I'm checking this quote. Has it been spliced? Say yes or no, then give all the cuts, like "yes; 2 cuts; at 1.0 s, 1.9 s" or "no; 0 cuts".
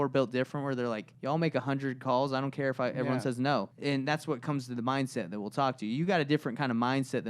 yes; 2 cuts; at 1.1 s, 3.7 s